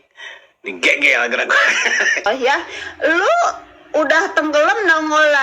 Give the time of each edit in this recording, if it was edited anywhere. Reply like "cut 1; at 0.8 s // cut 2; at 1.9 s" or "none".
cut 1; at 2.3 s